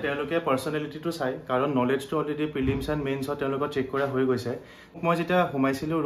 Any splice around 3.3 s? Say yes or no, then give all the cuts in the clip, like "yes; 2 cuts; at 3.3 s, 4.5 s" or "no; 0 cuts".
no; 1 cut; at 5.0 s